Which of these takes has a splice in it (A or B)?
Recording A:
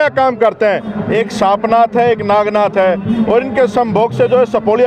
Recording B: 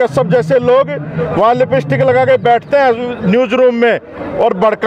A